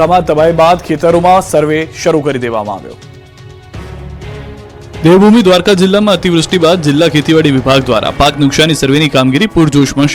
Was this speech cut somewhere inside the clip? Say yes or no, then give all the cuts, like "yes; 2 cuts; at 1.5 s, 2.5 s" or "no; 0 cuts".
no; 0 cuts